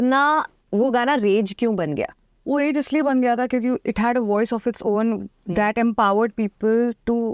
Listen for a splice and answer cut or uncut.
uncut